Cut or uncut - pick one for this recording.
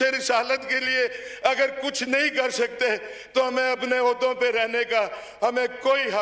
uncut